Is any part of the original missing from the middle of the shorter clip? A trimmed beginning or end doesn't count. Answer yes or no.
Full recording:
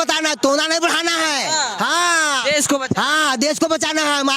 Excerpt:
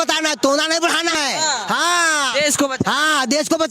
yes